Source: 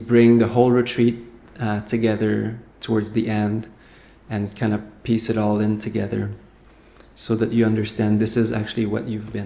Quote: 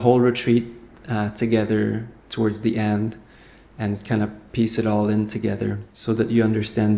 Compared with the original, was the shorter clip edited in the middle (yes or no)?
yes